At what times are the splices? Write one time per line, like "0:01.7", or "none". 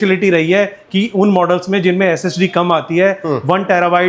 none